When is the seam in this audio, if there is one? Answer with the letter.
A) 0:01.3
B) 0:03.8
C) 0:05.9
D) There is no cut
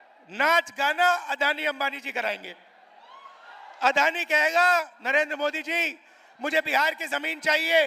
B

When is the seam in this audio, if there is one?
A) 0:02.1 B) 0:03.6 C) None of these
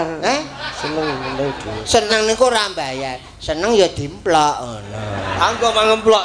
A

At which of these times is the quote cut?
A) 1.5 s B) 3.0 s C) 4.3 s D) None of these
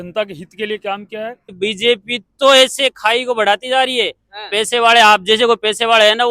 A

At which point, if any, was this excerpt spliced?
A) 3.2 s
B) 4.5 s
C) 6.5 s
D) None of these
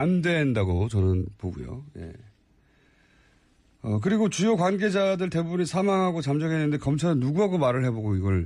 C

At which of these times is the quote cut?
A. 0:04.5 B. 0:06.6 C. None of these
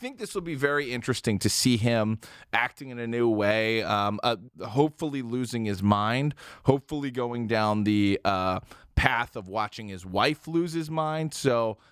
A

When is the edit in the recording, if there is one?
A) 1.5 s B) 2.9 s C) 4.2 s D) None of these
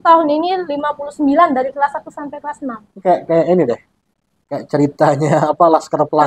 B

